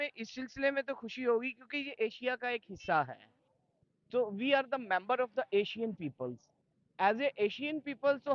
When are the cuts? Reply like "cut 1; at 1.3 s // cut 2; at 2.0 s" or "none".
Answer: none